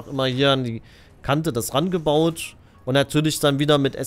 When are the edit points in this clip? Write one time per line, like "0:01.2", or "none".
none